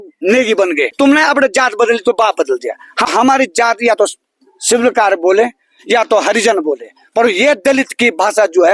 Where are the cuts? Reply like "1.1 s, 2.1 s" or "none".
0.9 s, 3.1 s